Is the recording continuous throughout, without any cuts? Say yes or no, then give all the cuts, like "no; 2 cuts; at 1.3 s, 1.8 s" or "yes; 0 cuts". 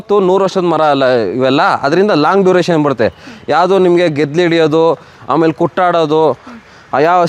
yes; 0 cuts